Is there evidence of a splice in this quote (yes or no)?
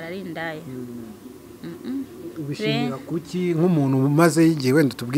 no